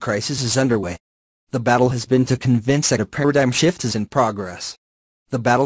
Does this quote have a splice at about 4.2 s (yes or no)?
no